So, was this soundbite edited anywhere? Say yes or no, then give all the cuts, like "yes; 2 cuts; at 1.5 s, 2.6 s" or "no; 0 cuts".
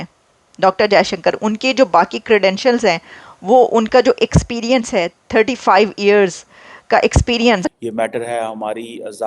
yes; 1 cut; at 7.8 s